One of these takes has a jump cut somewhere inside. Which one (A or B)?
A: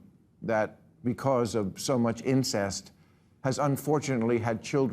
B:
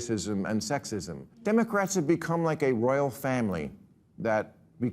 B